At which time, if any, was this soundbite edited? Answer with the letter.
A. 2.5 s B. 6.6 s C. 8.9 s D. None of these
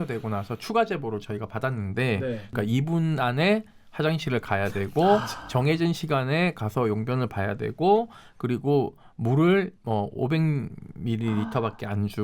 A